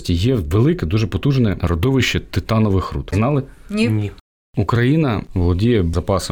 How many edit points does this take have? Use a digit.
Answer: 4